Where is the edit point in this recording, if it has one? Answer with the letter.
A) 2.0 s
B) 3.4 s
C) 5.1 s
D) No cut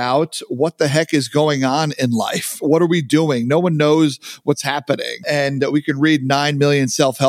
C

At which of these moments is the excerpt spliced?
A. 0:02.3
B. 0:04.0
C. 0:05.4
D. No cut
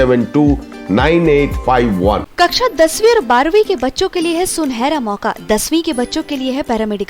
A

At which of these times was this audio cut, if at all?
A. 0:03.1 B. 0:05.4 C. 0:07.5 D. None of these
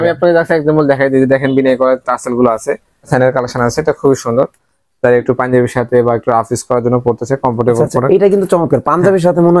A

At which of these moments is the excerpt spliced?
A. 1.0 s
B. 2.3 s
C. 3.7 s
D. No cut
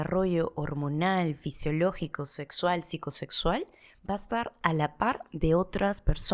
D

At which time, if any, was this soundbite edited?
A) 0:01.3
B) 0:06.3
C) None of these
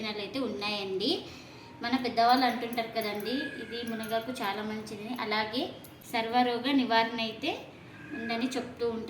B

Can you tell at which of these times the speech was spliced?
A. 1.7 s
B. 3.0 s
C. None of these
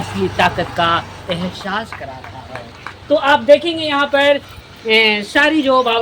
C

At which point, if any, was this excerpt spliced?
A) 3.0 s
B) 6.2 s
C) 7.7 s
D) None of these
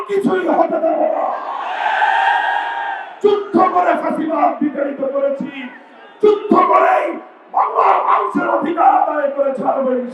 A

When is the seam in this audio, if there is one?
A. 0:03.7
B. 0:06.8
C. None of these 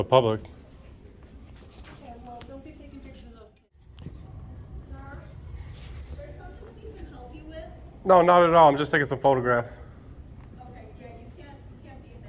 A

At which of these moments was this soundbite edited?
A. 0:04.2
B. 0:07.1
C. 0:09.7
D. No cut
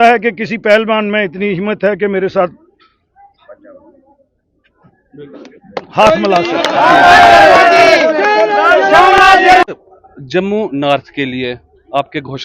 C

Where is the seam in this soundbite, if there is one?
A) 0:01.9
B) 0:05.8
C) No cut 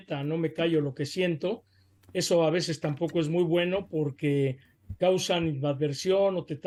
C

